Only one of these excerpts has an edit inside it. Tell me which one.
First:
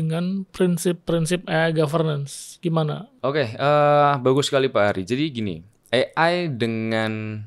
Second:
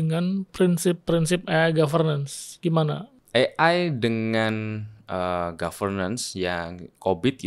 second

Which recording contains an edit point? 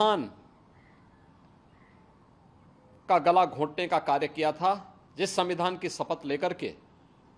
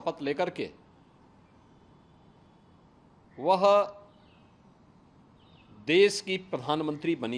first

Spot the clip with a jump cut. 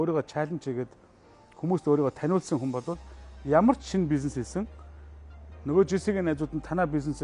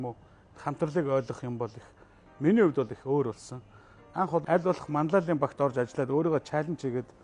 second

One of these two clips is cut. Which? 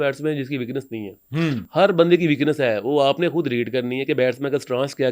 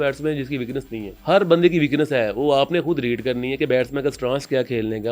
second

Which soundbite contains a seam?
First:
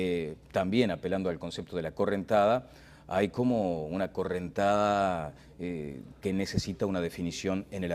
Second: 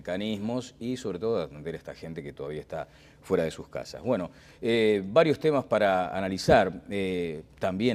first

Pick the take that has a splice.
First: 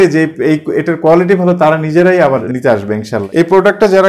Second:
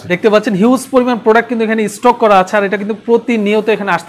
first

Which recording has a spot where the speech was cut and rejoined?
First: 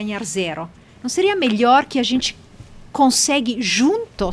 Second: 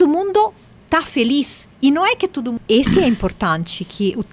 second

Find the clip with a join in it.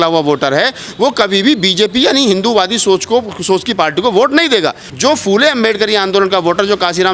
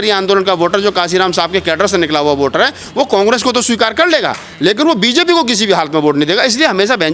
first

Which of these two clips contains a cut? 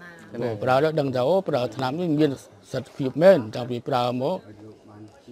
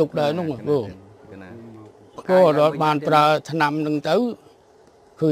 second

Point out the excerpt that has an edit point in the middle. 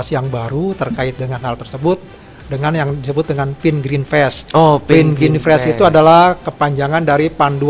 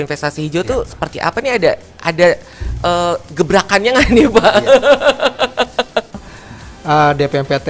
second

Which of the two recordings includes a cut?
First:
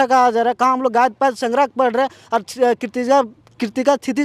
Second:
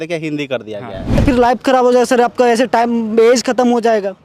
second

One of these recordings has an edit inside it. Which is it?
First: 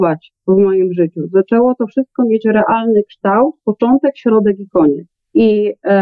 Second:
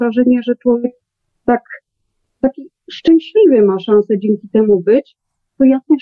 first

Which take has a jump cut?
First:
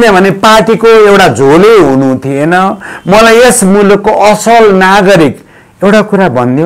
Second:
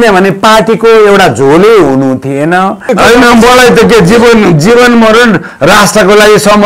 second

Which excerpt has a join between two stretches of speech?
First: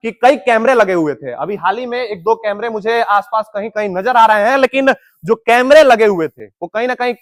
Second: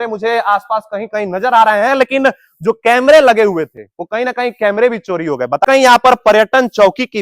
second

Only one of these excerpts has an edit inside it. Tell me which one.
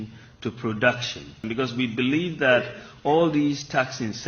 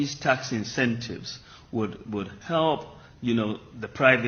first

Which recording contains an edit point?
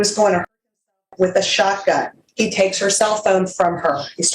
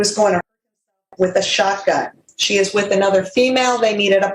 first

